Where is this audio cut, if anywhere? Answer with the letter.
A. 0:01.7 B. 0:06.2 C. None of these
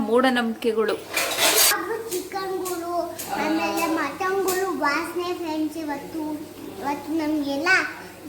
A